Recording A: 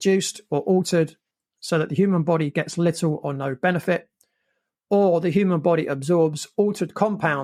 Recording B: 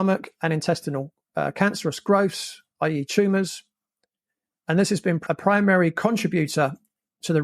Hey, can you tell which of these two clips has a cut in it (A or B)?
B